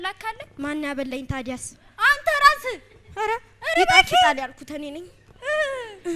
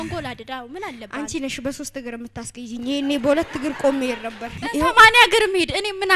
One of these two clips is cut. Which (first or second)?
second